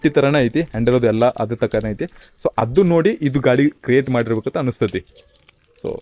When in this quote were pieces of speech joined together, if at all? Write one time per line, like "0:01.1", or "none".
none

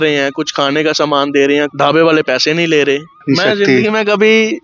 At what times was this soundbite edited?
0:01.7
0:03.1

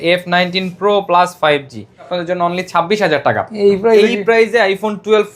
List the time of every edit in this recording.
0:02.1

